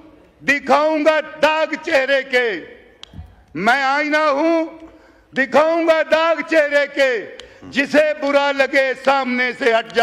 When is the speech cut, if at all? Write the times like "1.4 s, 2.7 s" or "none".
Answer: none